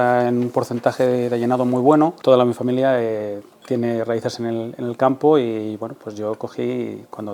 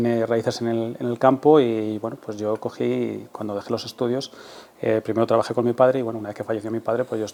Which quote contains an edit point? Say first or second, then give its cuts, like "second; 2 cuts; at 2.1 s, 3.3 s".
first; 1 cut; at 2.2 s